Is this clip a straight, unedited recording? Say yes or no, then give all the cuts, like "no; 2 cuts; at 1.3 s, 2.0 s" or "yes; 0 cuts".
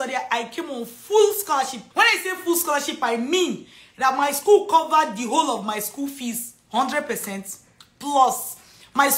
no; 1 cut; at 1.8 s